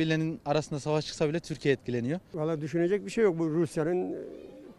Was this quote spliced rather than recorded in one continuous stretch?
no; 0 cuts

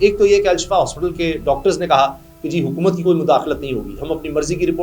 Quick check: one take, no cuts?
yes; 0 cuts

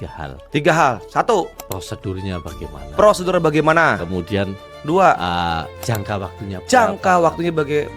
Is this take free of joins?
yes; 0 cuts

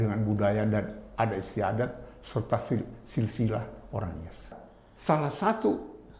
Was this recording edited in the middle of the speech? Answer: yes; 1 cut; at 4.5 s

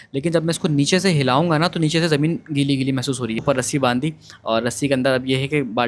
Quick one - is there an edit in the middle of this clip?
yes; 1 cut; at 3.4 s

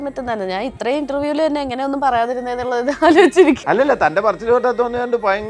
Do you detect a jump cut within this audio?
yes; 1 cut; at 3.6 s

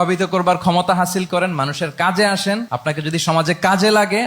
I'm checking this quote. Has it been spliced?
yes; 1 cut; at 2.7 s

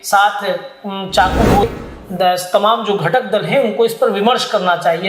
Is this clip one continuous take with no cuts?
no; 1 cut; at 1.6 s

